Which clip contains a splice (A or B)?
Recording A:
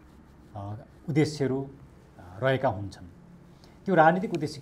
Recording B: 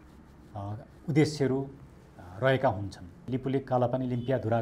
B